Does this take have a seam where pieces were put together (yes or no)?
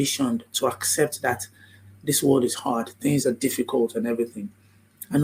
no